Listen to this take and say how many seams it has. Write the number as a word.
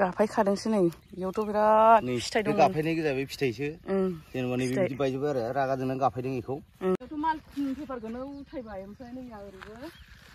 one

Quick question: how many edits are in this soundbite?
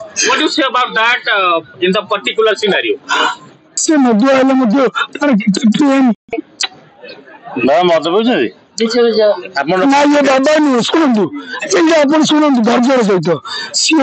one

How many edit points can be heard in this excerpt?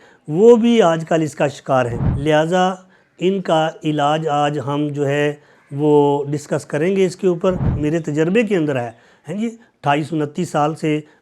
two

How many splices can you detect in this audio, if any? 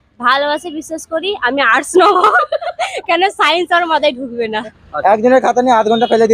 one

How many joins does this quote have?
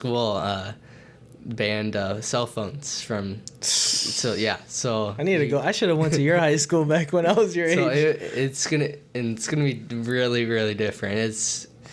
zero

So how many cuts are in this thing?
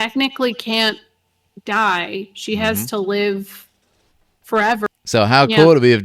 one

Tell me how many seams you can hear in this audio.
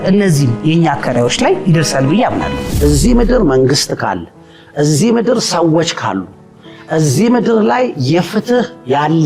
one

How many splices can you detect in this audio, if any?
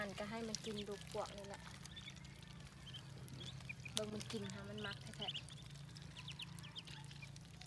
zero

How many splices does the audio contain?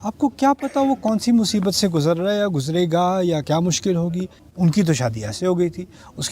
one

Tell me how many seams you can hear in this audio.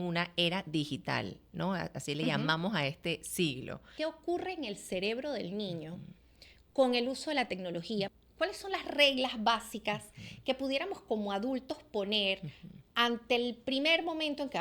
two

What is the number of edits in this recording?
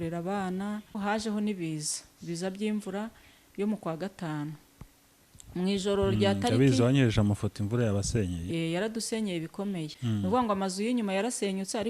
two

